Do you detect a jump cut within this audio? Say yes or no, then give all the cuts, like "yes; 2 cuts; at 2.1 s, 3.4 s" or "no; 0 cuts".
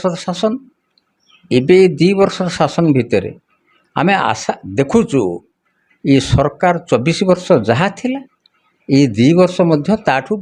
no; 0 cuts